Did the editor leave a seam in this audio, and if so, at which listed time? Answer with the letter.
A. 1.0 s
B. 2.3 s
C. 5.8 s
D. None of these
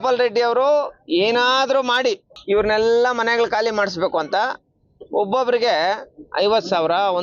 B